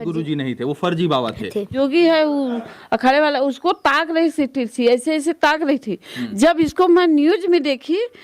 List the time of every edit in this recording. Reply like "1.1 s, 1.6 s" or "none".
1.7 s